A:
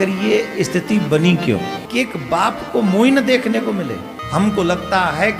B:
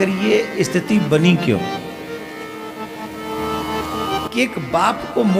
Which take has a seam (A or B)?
A